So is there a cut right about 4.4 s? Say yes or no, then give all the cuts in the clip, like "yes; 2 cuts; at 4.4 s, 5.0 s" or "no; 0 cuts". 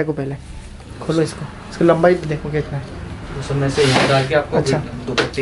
no; 0 cuts